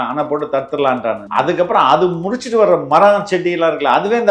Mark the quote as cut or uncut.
cut